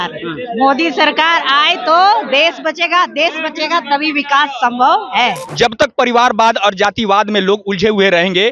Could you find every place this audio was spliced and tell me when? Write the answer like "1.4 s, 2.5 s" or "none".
5.4 s

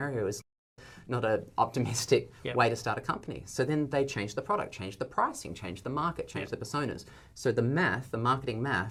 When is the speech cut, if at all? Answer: none

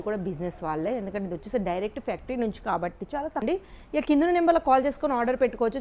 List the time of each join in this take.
3.4 s

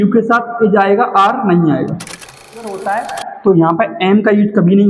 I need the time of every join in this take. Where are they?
2.7 s

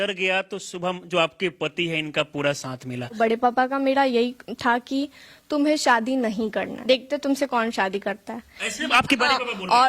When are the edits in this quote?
3.2 s, 6.7 s

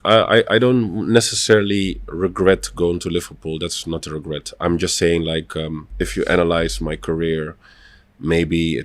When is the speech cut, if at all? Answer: 5.8 s

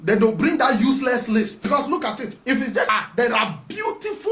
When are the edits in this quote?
1.5 s, 2.9 s

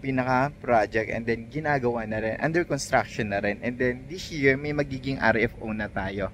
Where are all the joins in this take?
none

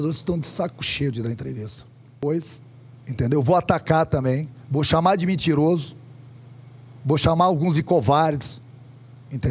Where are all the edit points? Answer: 2.2 s

